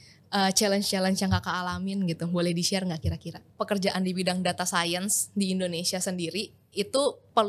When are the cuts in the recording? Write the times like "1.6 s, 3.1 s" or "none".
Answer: 3.5 s